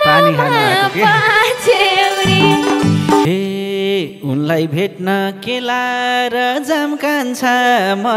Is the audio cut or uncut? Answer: cut